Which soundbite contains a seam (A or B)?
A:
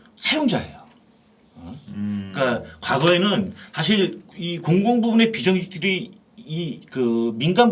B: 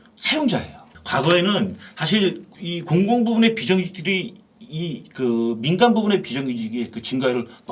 B